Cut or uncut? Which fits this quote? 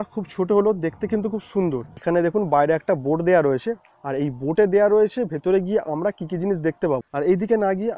cut